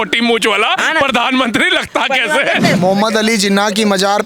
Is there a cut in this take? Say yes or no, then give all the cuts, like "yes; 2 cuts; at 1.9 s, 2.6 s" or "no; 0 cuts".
yes; 1 cut; at 2.8 s